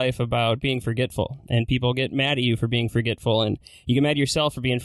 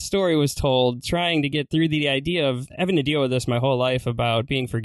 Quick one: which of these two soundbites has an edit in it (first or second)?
second